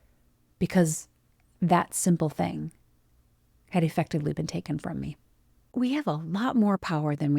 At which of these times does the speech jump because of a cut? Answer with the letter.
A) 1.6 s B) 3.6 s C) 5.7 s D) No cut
C